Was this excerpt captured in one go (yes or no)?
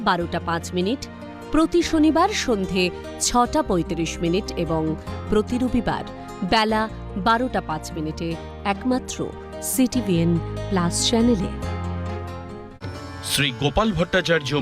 no